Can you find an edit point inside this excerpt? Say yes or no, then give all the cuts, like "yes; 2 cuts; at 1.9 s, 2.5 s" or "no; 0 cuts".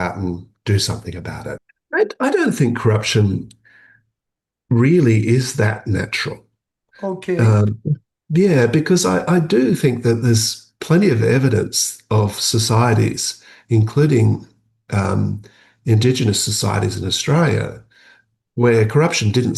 yes; 1 cut; at 1.7 s